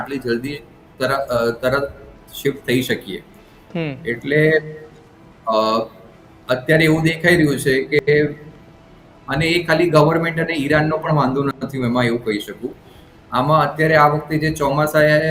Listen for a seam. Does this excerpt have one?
no; 0 cuts

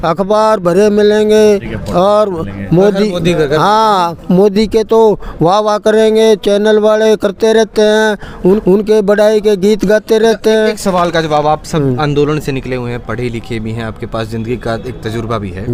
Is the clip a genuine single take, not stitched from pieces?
yes; 0 cuts

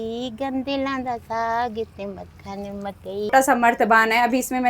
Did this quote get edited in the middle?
yes; 1 cut; at 3.3 s

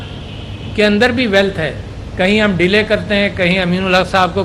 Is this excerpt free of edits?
no; 1 cut; at 3.5 s

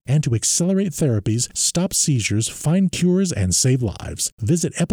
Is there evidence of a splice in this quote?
no; 0 cuts

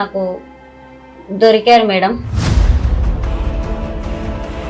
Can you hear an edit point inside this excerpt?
yes; 1 cut; at 2.3 s

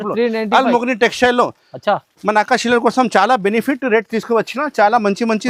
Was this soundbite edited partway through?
no; 0 cuts

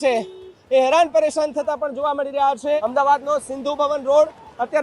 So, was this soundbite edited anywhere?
yes; 1 cut; at 2.8 s

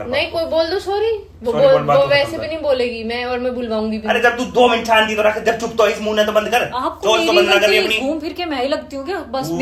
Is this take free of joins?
yes; 0 cuts

